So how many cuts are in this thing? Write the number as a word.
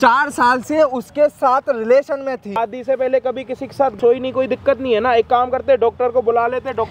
two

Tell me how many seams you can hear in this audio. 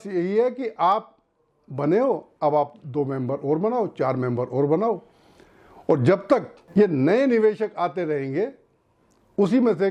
zero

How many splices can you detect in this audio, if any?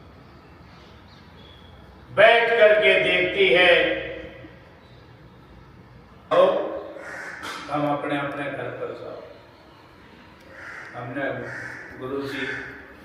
one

